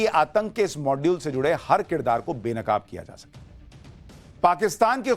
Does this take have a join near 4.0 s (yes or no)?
no